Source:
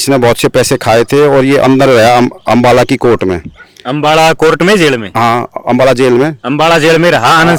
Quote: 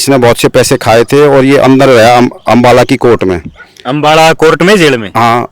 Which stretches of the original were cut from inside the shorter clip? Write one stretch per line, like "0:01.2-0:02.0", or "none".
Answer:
none